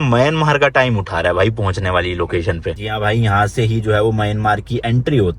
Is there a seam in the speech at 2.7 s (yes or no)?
yes